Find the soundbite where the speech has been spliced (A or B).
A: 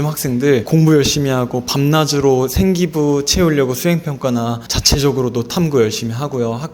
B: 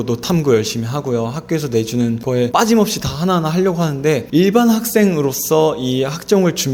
B